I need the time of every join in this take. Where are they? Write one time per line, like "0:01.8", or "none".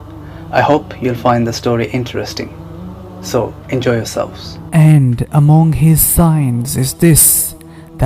0:04.8